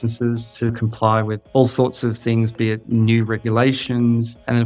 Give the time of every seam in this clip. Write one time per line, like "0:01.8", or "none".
0:01.4
0:02.8